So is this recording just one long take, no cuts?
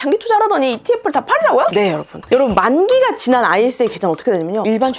no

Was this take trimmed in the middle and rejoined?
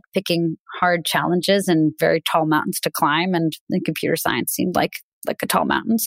no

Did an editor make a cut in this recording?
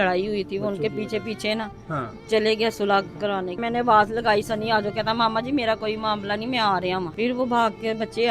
yes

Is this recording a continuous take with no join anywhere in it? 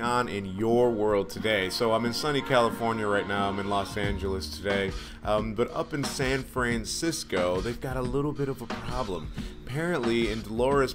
no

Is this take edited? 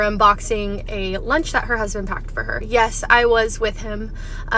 yes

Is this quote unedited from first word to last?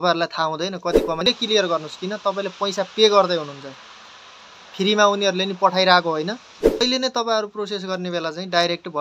no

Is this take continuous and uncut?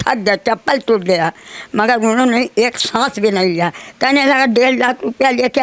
yes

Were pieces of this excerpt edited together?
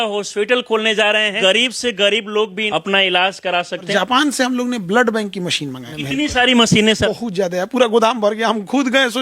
yes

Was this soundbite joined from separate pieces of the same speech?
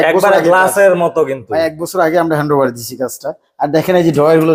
no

